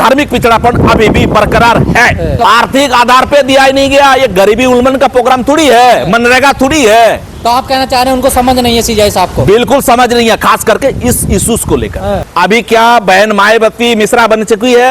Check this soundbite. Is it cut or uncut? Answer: cut